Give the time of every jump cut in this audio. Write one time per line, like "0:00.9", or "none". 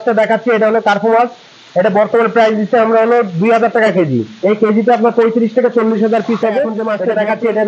0:06.8